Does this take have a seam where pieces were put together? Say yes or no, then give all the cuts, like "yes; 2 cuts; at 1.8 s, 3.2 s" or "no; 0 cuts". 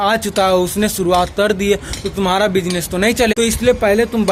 yes; 1 cut; at 3.3 s